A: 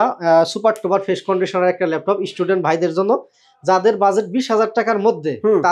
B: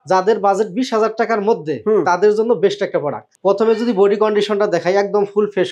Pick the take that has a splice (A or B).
B